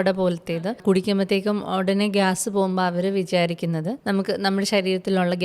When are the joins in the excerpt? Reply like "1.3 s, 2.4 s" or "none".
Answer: 0.8 s, 4.0 s